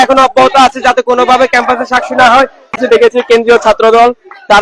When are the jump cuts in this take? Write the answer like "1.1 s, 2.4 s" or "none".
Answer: 2.8 s